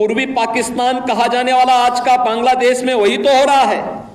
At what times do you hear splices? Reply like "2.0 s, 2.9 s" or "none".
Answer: none